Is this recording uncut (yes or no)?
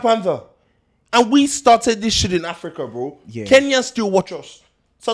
yes